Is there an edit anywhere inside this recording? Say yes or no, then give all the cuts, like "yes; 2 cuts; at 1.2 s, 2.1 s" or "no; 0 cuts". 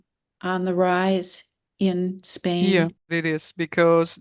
yes; 1 cut; at 3.1 s